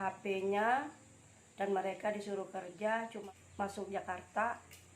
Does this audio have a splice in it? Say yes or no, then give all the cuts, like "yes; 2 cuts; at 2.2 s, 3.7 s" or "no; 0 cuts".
yes; 1 cut; at 3.2 s